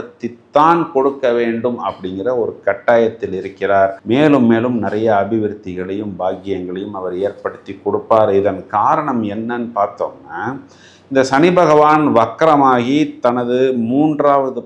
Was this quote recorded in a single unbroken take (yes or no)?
yes